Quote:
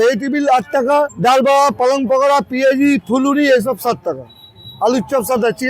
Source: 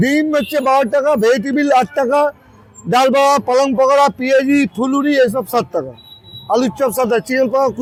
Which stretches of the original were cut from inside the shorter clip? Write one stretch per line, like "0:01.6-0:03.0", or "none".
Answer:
0:02.4-0:02.8